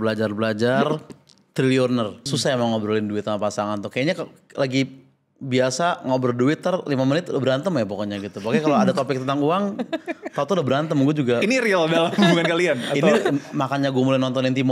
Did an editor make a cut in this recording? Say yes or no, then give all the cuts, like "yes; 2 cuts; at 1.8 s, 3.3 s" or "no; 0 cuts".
yes; 1 cut; at 2.2 s